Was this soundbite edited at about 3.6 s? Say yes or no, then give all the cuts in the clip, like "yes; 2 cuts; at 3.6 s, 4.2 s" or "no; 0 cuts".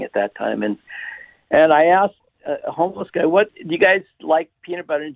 yes; 2 cuts; at 2.2 s, 3.6 s